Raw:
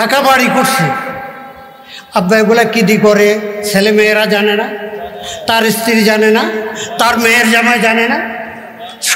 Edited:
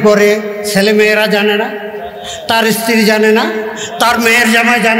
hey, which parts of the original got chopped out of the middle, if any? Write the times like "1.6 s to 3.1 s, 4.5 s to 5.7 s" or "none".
none